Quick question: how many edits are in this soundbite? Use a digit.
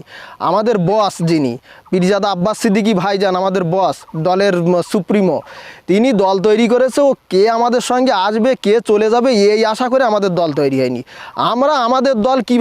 0